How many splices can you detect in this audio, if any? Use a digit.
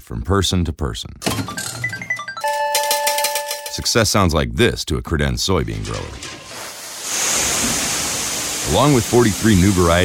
0